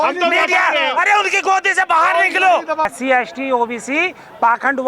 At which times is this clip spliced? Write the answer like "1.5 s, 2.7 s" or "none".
2.9 s